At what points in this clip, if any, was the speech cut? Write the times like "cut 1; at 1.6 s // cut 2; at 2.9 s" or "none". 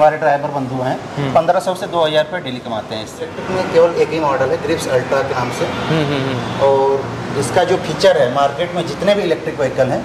cut 1; at 3.4 s